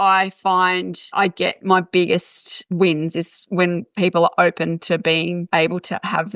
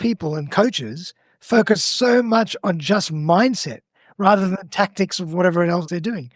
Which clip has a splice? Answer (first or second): first